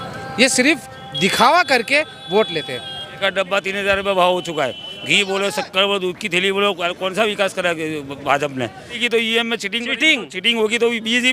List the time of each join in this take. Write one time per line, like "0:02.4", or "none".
0:03.2
0:09.0